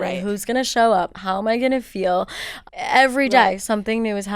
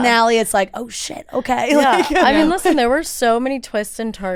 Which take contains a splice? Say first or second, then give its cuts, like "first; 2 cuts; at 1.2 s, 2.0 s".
first; 1 cut; at 2.6 s